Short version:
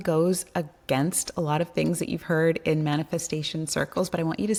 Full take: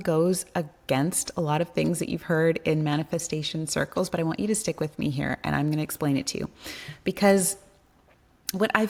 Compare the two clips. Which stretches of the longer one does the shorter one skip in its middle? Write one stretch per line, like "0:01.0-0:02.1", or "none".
none

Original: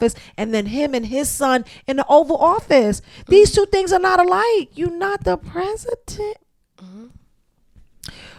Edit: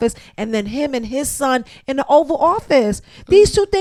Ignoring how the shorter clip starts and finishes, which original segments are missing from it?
none

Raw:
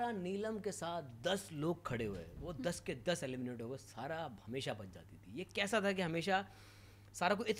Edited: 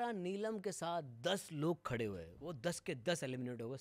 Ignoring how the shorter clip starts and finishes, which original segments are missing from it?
none

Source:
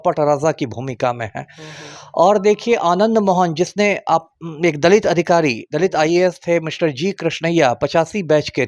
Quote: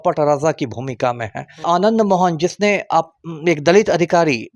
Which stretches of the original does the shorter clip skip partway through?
0:01.6-0:02.8

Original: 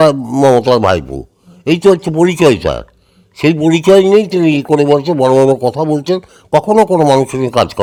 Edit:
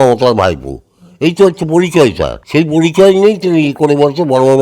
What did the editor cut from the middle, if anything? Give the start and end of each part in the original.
0:02.8-0:03.2

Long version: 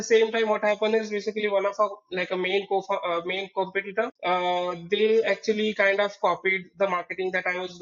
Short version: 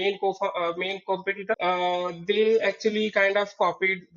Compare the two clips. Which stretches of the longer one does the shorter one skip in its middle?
0:04.1-0:04.2

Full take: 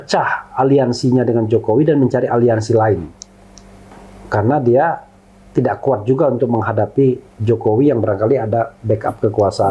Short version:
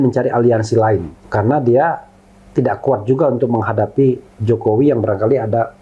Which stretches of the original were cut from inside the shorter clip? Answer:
0:03.1-0:04.2

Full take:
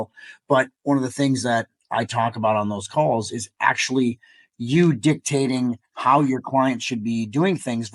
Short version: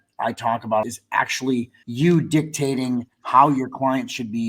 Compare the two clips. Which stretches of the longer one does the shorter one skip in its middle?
0:02.6-0:03.3
0:04.3-0:04.5

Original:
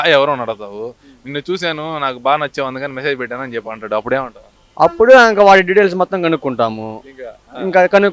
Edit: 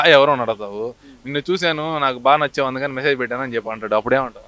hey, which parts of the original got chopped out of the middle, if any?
none

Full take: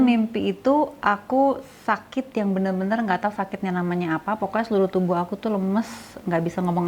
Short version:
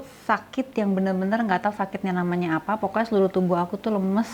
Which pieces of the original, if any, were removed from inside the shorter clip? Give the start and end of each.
none

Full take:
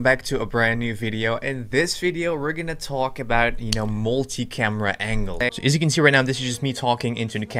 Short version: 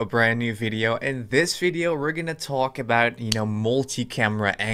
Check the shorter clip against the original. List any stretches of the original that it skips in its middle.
none

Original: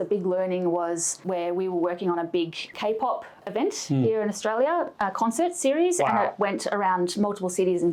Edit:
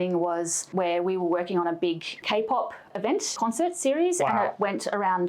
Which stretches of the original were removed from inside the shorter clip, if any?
0:03.8-0:05.1

